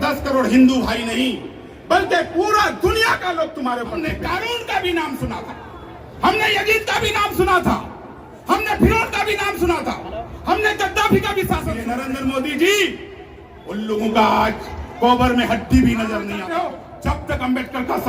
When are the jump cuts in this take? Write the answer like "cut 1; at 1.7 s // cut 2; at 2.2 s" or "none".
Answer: cut 1; at 4.1 s // cut 2; at 11.9 s // cut 3; at 16.4 s